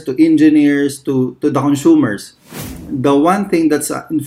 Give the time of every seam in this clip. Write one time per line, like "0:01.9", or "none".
0:02.6